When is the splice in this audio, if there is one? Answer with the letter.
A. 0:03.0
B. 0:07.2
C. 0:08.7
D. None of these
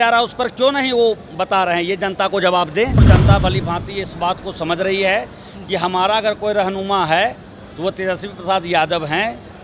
A